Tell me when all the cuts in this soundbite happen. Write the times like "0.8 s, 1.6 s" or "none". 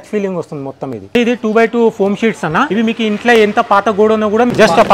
1.1 s, 2.7 s